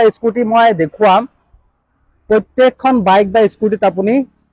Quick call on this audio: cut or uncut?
uncut